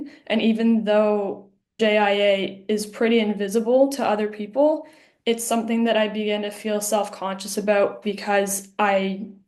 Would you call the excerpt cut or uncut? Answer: cut